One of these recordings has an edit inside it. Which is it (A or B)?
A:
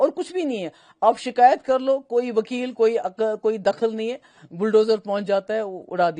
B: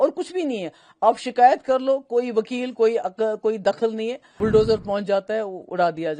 B